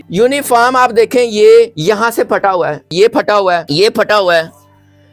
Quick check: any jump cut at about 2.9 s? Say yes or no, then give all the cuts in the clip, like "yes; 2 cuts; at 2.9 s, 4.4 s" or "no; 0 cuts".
yes; 3 cuts; at 1.8 s, 2.9 s, 3.7 s